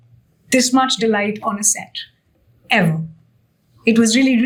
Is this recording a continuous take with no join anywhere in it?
yes; 0 cuts

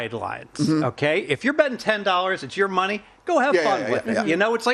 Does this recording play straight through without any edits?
yes; 0 cuts

